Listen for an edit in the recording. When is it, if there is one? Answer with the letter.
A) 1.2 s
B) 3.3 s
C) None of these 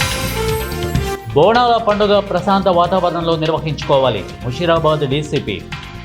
C